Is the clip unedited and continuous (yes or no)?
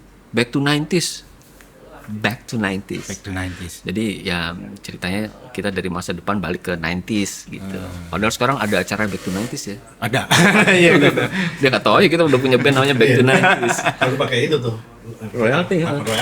yes